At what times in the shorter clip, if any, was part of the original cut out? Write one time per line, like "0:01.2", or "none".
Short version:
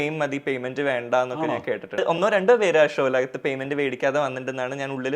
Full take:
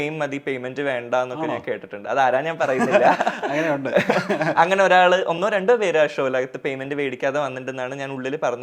0:02.0